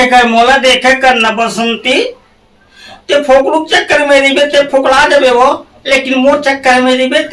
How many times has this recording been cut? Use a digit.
0